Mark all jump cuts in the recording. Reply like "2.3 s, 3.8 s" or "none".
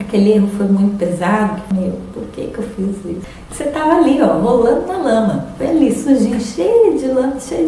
1.6 s, 3.2 s

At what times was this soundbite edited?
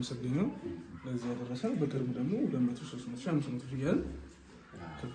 none

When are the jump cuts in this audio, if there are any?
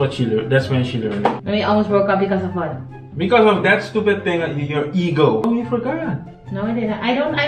1.4 s, 5.4 s

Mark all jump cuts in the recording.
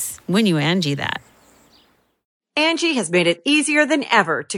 2.2 s

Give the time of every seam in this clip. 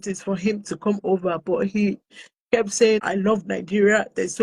3.0 s

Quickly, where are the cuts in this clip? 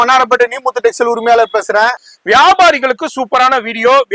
2.1 s

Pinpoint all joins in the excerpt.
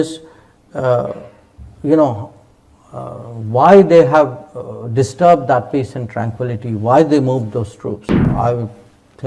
8.3 s

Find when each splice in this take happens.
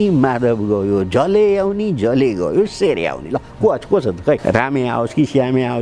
4.4 s

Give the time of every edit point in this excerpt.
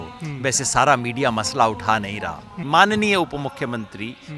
2.5 s

